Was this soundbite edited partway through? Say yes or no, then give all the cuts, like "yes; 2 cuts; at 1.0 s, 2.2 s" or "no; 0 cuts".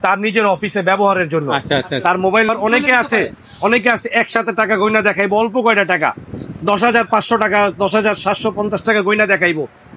yes; 1 cut; at 2.5 s